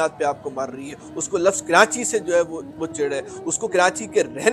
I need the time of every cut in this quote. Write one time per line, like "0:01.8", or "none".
none